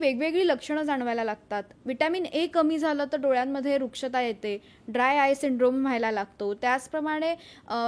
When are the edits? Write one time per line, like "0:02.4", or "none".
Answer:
none

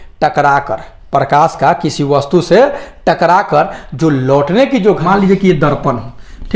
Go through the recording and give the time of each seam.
0:05.0

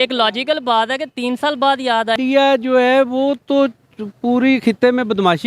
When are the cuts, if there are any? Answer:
0:02.2

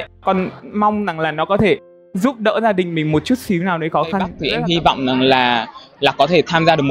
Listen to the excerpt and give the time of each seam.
0:04.4

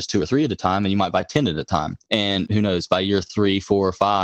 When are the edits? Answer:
0:02.4

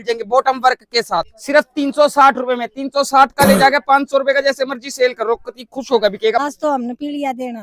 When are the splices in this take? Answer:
0:01.4
0:06.4

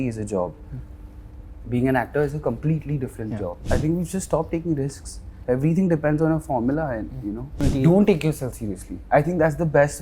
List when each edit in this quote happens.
0:03.6
0:07.6

